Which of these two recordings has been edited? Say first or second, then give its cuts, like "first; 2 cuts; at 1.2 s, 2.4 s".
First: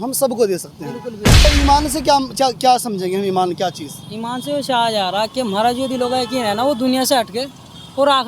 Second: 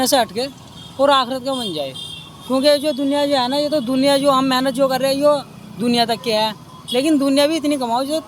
first; 1 cut; at 1.5 s